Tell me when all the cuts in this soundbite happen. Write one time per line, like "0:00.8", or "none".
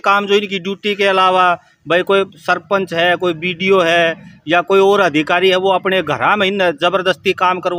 none